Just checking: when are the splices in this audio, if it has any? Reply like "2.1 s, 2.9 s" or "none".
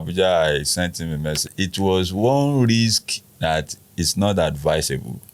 1.5 s

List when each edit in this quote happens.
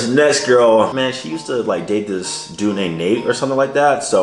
0.9 s

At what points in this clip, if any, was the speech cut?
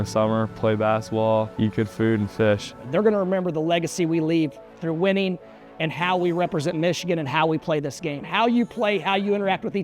1.5 s, 2.8 s

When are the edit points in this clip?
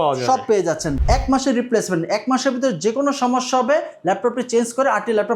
0.9 s

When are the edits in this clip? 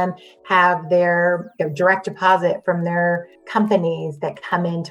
3.4 s

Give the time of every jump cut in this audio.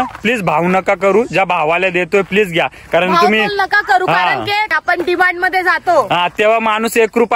4.8 s

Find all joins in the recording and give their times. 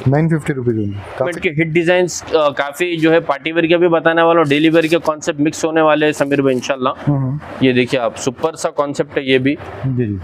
1.4 s

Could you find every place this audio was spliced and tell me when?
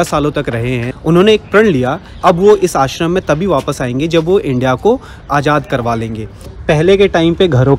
0.9 s, 2.1 s, 5.3 s, 6.4 s

